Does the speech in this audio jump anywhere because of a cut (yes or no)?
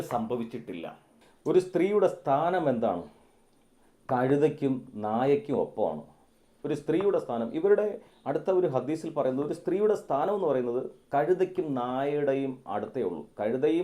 yes